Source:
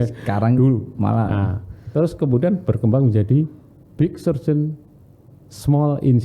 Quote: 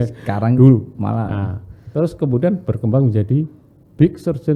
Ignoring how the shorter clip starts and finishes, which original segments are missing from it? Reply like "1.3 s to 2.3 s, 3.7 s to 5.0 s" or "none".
none